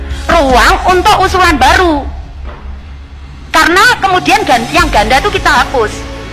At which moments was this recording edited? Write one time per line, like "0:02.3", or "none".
none